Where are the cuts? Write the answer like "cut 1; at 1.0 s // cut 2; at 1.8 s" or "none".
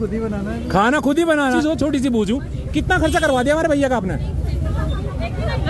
cut 1; at 1.6 s